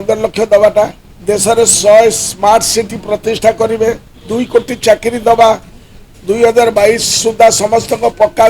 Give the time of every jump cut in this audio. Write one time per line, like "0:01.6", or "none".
0:01.1